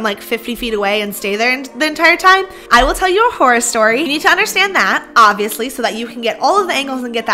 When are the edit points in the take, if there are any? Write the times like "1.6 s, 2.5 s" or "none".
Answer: 2.6 s, 4.1 s